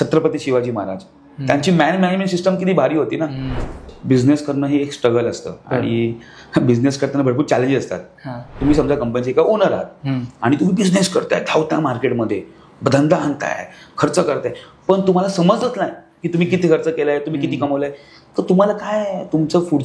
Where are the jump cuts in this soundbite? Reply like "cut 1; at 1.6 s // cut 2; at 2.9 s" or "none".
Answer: cut 1; at 3.7 s // cut 2; at 8.5 s